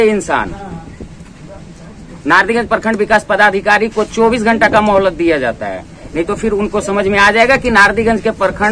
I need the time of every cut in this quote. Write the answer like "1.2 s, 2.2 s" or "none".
none